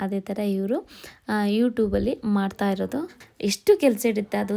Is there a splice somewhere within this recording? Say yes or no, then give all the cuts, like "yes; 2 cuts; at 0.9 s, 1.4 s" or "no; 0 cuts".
yes; 1 cut; at 3.2 s